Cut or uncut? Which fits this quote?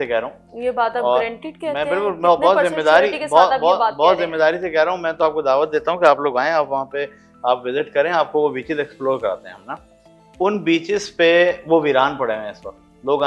uncut